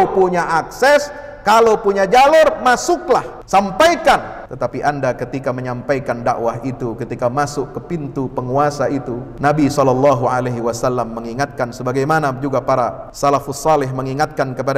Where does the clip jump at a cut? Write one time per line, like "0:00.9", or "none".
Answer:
0:03.4
0:04.4
0:09.2
0:13.0